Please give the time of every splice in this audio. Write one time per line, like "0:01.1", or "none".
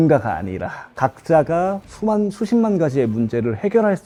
none